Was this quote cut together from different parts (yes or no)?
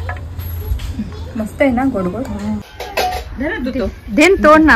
yes